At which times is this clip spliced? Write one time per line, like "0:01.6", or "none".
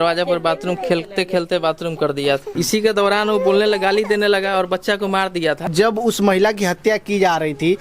0:02.5
0:05.7